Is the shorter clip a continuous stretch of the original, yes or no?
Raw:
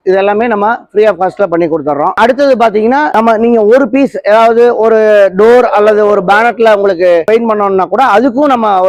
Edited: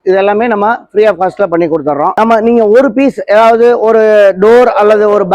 no